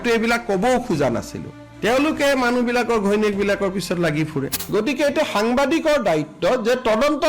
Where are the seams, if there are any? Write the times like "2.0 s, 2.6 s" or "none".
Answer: 4.7 s